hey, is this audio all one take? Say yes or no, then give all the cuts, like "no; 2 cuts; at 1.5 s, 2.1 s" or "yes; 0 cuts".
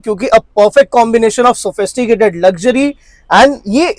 yes; 0 cuts